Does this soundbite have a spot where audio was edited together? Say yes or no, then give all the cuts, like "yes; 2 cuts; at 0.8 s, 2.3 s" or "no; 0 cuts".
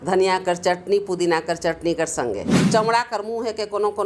yes; 1 cut; at 2.5 s